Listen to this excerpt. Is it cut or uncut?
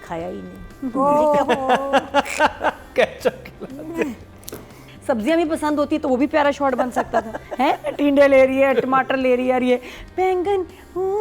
cut